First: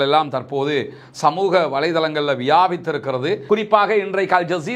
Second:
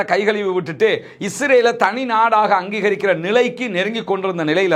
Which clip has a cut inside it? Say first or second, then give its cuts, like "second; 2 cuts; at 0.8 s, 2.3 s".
first; 1 cut; at 3.4 s